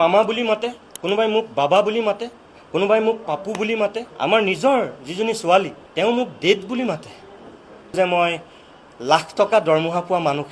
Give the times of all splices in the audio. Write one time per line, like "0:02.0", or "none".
0:04.1
0:05.8
0:07.9